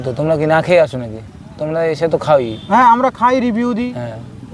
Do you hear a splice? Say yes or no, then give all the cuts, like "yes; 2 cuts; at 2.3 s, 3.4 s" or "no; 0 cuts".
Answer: no; 0 cuts